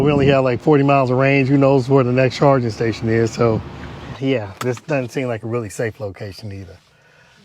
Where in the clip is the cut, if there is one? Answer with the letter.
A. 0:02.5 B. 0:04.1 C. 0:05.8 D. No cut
B